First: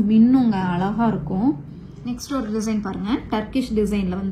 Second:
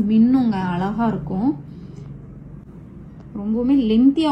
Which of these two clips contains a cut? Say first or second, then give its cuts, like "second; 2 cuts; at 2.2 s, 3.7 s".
first; 1 cut; at 1.9 s